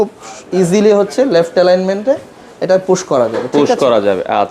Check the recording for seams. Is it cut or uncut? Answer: uncut